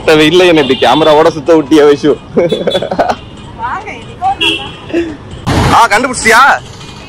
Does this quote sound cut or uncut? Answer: uncut